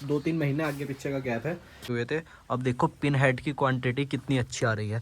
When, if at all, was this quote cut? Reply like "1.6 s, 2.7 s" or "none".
1.8 s